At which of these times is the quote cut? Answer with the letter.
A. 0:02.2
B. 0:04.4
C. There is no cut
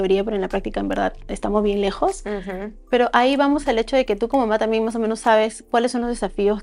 C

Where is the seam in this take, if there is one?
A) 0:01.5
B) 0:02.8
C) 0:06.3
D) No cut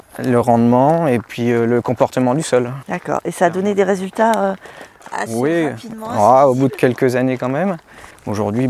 B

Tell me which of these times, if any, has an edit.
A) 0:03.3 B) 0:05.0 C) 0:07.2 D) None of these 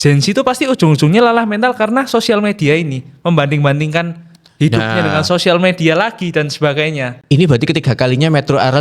D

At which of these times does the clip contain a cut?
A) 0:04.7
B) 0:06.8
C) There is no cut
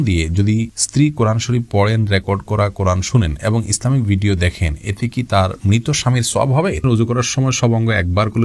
B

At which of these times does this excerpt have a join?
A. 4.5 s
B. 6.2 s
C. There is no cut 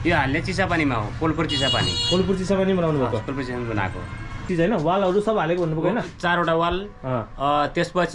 A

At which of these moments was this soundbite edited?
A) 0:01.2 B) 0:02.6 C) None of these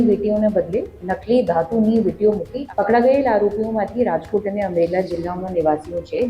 B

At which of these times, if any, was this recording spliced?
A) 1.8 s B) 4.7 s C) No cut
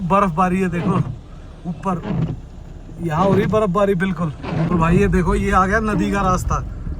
B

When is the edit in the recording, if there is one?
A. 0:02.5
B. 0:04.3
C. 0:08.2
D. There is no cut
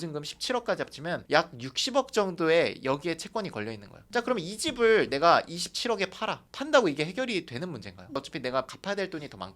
C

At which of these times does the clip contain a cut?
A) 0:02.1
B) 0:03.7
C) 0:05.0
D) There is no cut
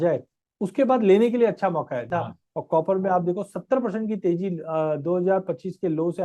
A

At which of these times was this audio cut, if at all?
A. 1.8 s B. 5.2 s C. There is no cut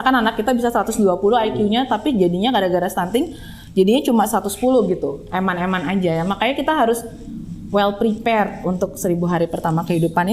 C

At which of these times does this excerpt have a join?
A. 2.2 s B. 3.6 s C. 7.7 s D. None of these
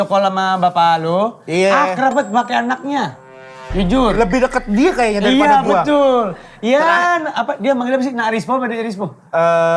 D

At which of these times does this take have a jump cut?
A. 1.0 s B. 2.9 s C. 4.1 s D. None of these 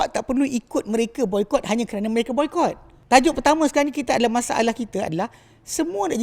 B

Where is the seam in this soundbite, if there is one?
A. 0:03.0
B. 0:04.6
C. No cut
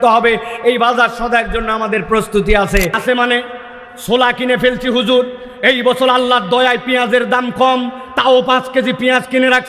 A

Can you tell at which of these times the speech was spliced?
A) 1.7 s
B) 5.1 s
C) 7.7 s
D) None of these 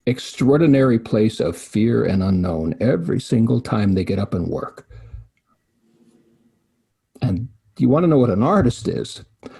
B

